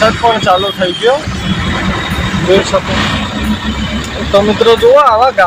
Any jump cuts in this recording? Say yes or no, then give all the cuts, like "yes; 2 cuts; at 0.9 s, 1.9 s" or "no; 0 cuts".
yes; 1 cut; at 2.8 s